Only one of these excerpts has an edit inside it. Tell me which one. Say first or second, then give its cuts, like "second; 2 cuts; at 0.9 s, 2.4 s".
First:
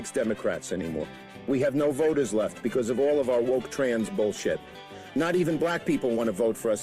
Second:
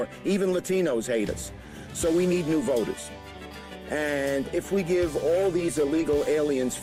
first; 1 cut; at 1.1 s